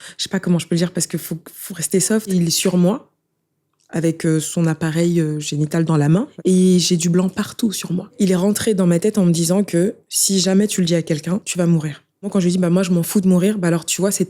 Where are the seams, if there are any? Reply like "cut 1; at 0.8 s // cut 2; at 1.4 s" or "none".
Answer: cut 1; at 2.3 s // cut 2; at 6.3 s // cut 3; at 8.1 s // cut 4; at 11.5 s // cut 5; at 12.3 s